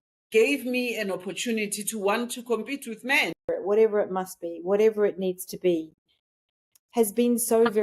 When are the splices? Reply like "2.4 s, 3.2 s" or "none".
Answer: 3.4 s